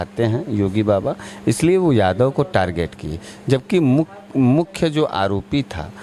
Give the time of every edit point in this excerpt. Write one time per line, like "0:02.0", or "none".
none